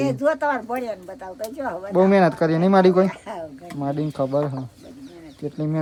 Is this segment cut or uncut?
uncut